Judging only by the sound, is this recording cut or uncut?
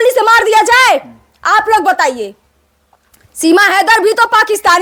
uncut